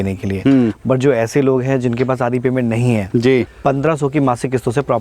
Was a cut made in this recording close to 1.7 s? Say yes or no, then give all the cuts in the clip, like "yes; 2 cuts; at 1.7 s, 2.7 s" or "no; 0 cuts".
no; 1 cut; at 3.5 s